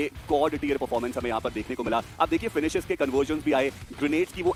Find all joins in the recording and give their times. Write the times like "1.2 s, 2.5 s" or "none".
none